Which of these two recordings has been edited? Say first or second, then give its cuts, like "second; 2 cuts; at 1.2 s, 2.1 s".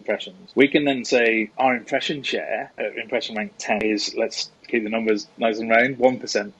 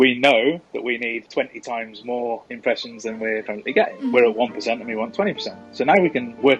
first; 1 cut; at 3.8 s